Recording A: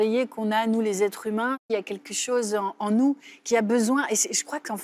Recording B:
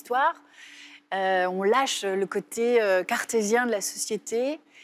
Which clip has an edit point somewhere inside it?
A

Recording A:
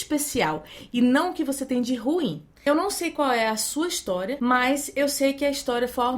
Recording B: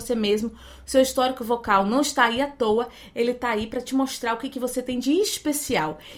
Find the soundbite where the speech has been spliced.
A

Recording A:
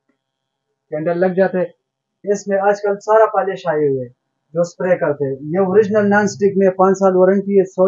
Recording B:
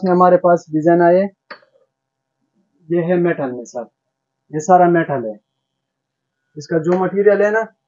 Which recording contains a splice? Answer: A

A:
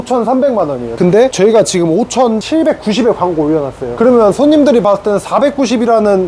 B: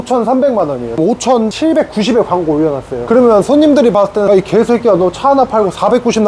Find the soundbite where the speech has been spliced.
B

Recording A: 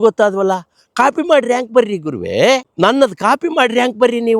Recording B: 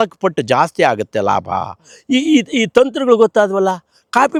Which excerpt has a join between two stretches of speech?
A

